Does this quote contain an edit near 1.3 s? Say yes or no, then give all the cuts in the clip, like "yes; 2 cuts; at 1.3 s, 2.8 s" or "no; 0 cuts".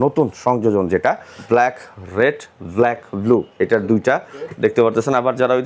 yes; 1 cut; at 1.3 s